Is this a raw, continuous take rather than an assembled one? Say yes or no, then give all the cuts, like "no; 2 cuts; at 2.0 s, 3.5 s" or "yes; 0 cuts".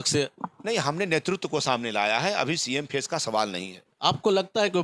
no; 1 cut; at 3.8 s